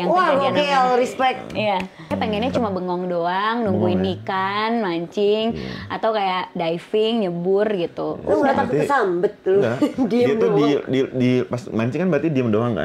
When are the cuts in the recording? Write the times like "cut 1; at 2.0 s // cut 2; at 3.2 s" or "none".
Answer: cut 1; at 2.1 s